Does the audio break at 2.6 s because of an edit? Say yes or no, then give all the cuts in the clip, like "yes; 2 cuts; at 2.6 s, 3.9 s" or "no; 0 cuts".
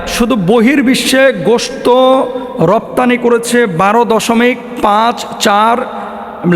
no; 0 cuts